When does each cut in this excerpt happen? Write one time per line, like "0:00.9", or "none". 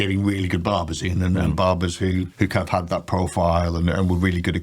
0:02.3